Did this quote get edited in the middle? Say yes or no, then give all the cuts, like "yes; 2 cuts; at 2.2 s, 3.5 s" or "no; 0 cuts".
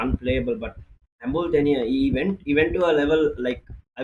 no; 0 cuts